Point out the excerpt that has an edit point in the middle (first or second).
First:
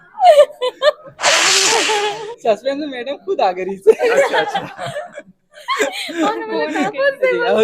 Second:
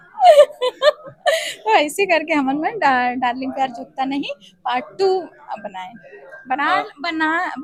first